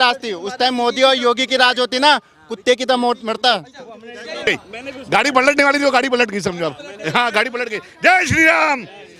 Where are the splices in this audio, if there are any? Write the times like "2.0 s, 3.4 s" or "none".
4.5 s